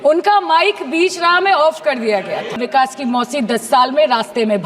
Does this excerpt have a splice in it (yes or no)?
yes